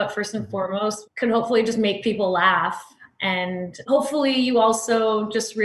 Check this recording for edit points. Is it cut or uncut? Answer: cut